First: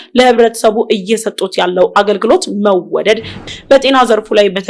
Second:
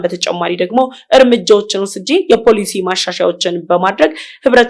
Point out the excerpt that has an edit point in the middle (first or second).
first